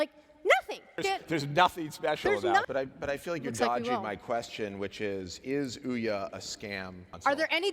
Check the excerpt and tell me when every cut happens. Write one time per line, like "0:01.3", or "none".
0:02.7